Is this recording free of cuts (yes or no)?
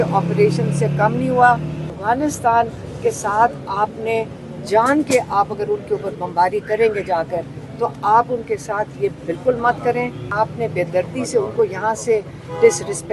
no